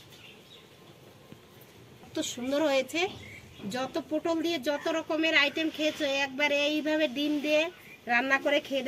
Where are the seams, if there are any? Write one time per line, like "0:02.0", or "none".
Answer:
0:02.1

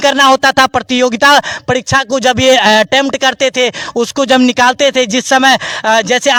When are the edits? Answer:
none

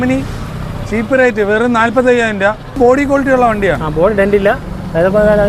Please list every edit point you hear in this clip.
0:02.8

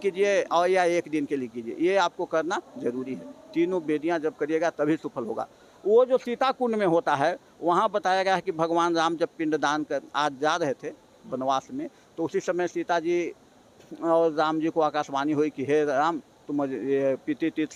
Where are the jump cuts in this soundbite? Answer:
none

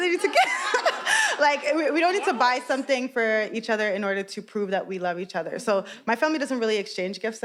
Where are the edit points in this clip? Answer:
none

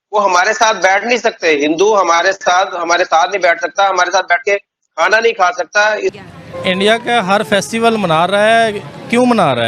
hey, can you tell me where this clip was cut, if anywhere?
0:06.2

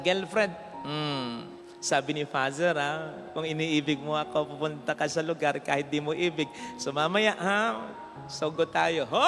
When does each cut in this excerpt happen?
none

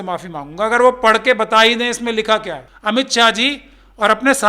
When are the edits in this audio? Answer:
0:02.7

